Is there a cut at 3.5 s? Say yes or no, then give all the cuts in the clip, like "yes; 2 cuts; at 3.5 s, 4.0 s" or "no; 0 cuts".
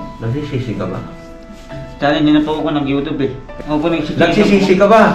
yes; 1 cut; at 3.5 s